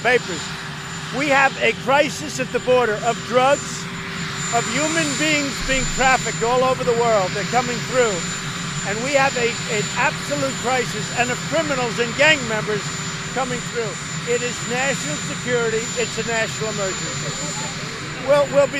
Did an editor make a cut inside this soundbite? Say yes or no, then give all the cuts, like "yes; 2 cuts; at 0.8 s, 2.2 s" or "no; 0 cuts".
no; 0 cuts